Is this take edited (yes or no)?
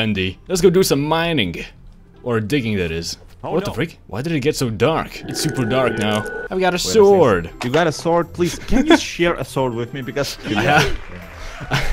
yes